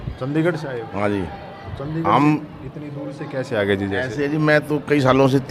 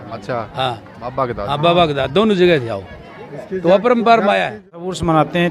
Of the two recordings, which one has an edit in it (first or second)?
second